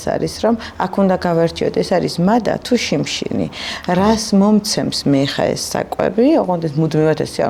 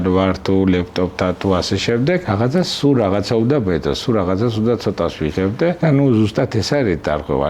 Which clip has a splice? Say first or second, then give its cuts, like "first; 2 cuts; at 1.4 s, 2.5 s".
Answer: second; 2 cuts; at 2.2 s, 5.8 s